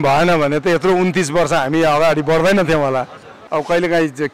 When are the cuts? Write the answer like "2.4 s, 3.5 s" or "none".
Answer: 3.3 s